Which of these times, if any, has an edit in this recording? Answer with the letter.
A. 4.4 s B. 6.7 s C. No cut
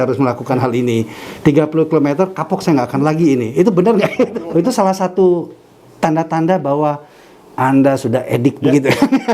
A